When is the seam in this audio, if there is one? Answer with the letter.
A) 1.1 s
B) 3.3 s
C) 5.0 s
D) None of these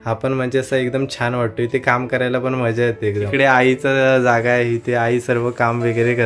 B